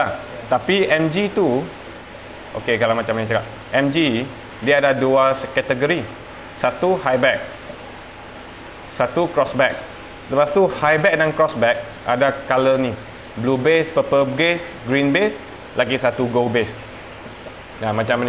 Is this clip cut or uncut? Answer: uncut